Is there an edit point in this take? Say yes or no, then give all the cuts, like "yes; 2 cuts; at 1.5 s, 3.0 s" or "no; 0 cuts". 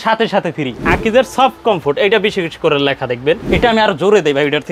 yes; 2 cuts; at 0.8 s, 3.4 s